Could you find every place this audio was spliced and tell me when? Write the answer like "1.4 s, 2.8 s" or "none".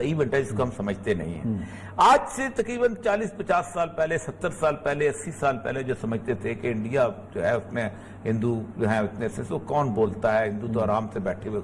none

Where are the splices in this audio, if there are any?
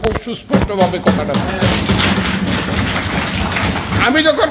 none

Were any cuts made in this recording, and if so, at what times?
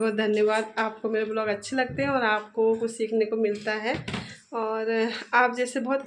none

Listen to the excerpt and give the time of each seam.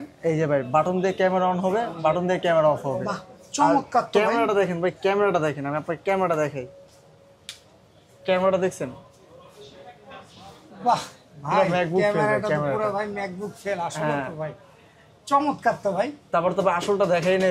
none

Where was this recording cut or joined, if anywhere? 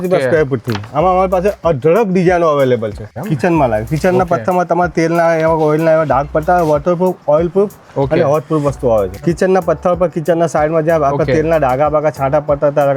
3.1 s, 9.2 s

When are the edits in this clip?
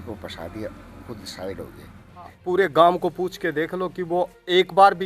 2.4 s

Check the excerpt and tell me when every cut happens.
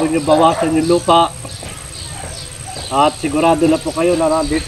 none

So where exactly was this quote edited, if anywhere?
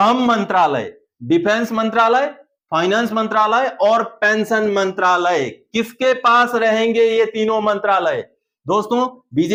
none

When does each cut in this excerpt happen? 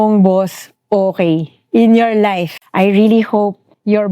2.6 s

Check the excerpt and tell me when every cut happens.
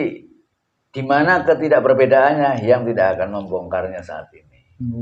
none

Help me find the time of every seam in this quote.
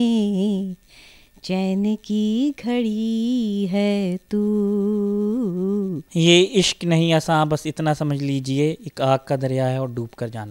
6.0 s

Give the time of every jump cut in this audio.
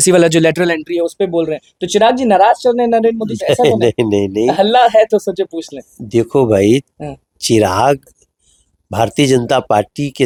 none

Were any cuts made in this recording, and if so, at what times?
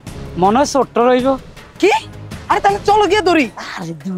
none

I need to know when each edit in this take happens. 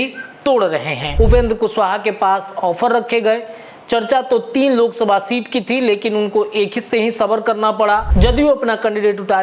1.1 s, 8.1 s

